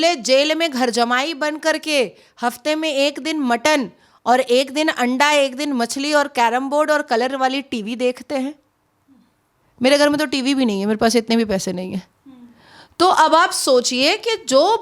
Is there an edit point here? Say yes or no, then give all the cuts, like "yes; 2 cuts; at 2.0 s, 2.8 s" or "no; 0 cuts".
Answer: no; 0 cuts